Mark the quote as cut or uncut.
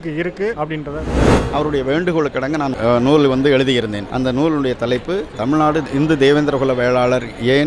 cut